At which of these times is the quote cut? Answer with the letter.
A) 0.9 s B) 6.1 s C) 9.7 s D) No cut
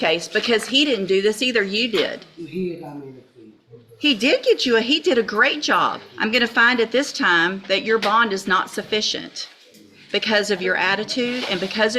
B